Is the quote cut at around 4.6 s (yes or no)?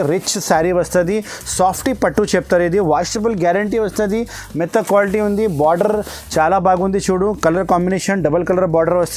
no